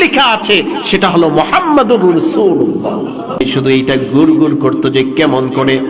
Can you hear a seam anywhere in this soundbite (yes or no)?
yes